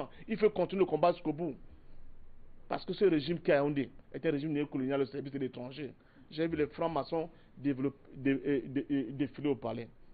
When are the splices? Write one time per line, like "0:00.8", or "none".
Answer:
none